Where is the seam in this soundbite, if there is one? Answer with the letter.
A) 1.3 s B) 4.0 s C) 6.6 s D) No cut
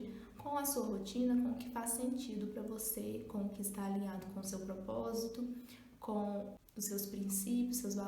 C